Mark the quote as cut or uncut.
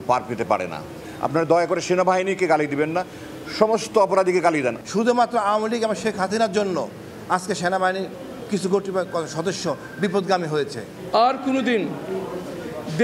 uncut